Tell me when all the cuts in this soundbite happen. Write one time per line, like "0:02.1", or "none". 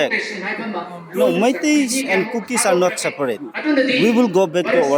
0:01.0
0:03.5